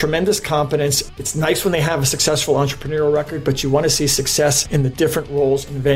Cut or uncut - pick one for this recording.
uncut